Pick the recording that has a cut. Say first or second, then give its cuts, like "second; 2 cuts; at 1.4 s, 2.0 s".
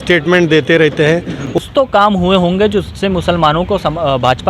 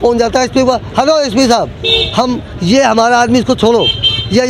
first; 1 cut; at 1.7 s